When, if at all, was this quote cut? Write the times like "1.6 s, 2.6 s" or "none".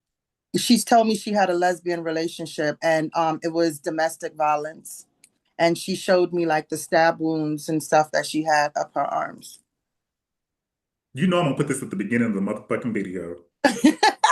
none